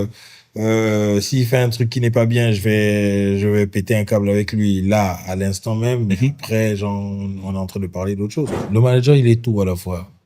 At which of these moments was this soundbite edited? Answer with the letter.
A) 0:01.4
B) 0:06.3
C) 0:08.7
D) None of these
C